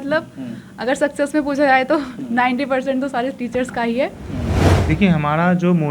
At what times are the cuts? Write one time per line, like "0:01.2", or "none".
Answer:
0:04.7

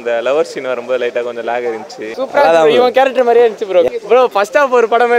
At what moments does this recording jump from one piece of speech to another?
0:02.1
0:03.9

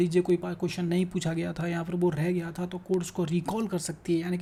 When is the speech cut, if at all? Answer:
none

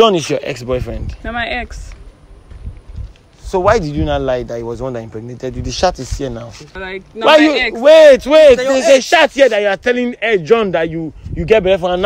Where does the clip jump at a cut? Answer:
0:06.7

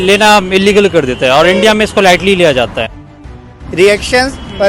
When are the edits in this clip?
0:03.4

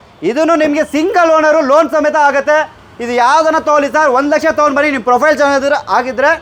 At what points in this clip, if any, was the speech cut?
none

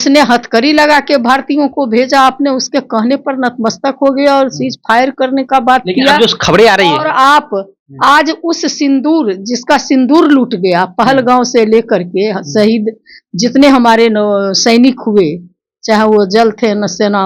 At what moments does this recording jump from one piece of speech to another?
none

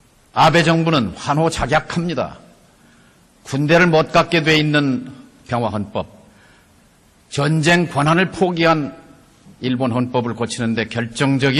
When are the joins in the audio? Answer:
none

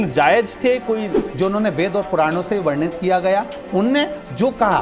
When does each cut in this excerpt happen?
0:01.2

